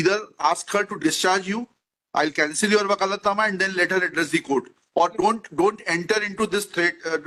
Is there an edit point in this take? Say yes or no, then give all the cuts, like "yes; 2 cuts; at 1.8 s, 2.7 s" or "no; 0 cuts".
no; 0 cuts